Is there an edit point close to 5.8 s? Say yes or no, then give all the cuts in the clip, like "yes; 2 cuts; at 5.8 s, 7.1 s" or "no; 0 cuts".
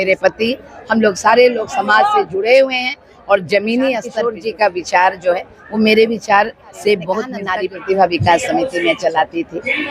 no; 2 cuts; at 4.2 s, 7.4 s